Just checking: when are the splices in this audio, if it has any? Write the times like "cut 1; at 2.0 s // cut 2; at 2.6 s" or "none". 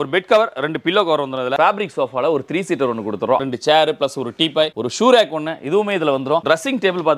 cut 1; at 1.5 s // cut 2; at 3.4 s // cut 3; at 6.4 s